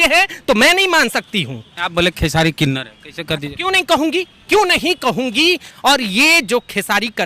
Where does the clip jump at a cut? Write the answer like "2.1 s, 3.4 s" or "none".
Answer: 1.8 s, 5.7 s

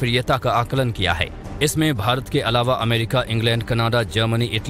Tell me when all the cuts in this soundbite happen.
none

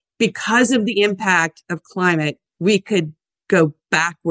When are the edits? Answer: 2.5 s

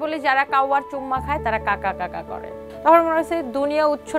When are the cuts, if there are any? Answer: 2.6 s

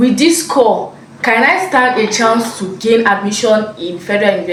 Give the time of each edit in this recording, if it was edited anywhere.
none

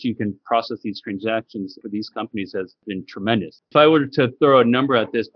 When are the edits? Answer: 1.8 s, 2.8 s

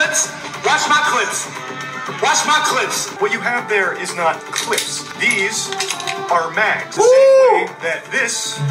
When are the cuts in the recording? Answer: 3.1 s, 5.0 s, 6.9 s

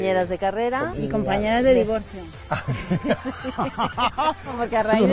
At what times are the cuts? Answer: 1.0 s

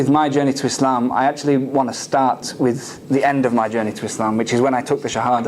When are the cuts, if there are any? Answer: 1.4 s

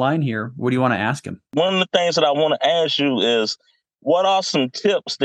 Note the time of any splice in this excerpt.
1.3 s

